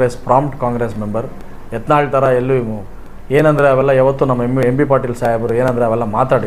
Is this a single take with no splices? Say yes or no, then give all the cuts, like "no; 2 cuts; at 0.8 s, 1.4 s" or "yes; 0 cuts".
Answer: yes; 0 cuts